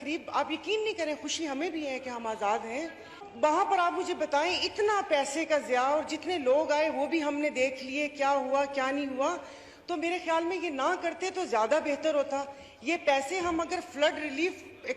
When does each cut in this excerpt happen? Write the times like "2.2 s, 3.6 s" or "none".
3.2 s